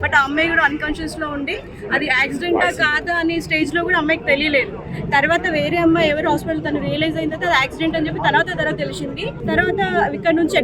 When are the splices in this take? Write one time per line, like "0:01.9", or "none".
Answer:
0:09.4